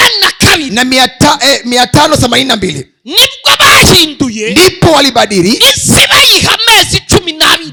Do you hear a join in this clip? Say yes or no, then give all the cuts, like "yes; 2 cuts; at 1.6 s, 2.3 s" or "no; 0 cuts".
no; 0 cuts